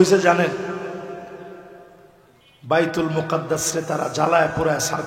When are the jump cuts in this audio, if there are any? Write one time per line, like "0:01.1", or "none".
none

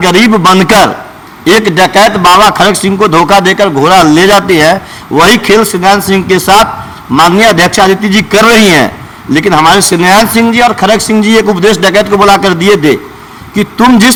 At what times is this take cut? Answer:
none

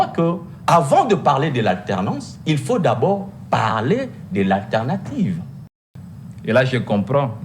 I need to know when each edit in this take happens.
0:05.9

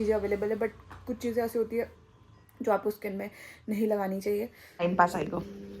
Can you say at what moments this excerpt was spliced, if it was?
0:04.8

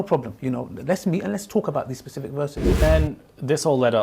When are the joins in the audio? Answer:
0:02.8

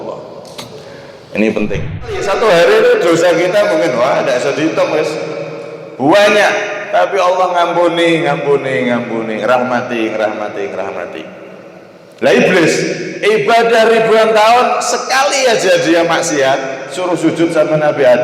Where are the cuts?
0:02.2

